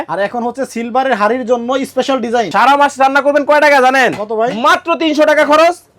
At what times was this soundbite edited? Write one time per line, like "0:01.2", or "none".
0:02.5